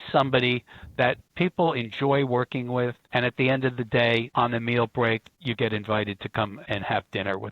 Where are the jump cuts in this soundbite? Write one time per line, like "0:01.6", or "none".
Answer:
0:01.3
0:03.0
0:04.3
0:05.3
0:06.6